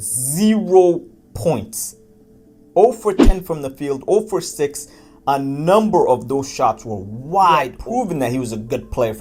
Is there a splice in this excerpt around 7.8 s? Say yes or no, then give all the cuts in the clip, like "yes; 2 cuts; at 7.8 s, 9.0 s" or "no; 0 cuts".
yes; 1 cut; at 7.8 s